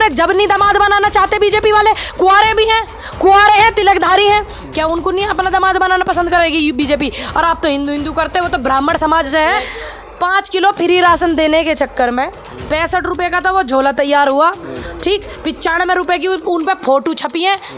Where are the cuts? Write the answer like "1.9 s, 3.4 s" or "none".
9.7 s